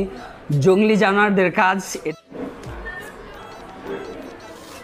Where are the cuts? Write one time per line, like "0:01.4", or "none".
0:02.1